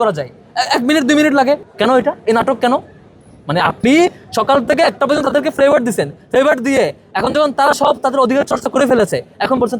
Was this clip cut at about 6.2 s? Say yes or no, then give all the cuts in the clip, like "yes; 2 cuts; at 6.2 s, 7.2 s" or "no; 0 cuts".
no; 1 cut; at 1.6 s